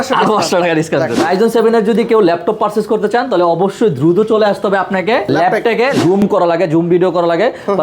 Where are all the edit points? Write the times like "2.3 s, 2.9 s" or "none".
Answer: 1.2 s, 6.2 s